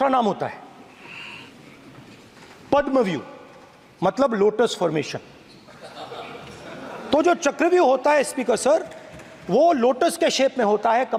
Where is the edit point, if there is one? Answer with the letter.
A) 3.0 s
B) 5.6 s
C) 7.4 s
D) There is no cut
D